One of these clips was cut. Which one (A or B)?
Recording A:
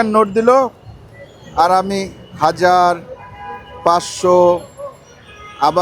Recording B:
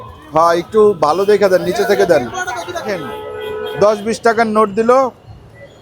B